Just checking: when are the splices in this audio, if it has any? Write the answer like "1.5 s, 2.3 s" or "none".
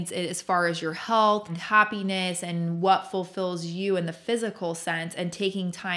1.6 s